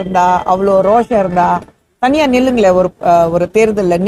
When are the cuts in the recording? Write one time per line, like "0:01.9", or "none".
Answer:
none